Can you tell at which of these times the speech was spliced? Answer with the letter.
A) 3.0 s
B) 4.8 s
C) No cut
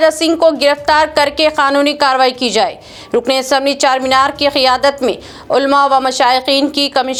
C